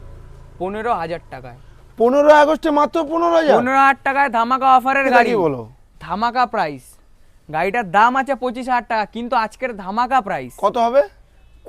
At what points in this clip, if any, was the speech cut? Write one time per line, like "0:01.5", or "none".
0:05.3